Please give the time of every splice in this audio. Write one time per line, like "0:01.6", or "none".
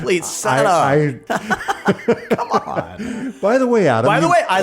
0:01.2

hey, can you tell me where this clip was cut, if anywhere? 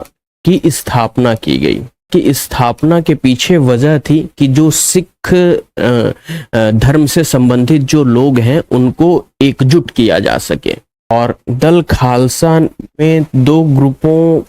0:02.1
0:11.1

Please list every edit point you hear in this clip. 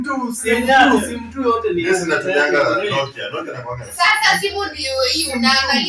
none

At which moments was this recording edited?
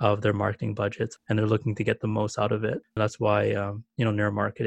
0:01.2
0:03.0

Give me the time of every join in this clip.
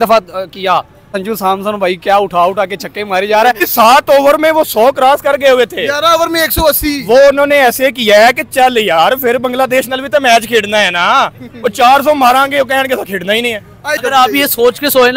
0:01.1
0:03.6
0:14.0

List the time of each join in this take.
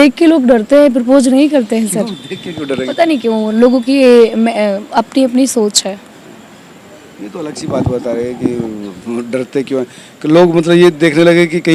none

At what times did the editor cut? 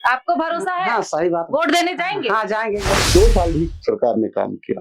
0:03.1

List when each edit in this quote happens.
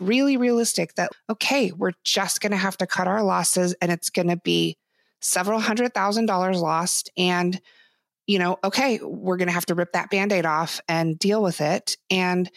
0:01.1

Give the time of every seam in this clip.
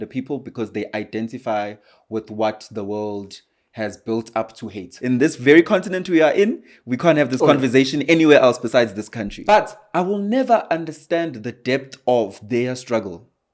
0:04.9
0:09.3

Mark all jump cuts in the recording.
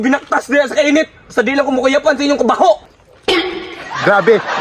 none

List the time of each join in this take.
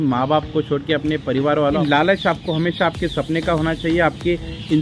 0:01.8

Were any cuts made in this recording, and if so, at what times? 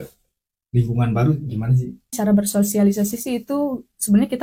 0:02.1

